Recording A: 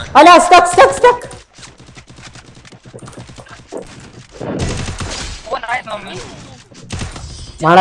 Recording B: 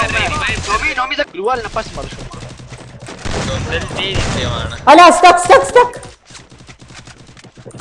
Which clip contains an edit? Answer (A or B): B